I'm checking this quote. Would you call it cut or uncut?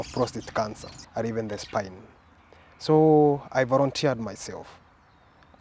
cut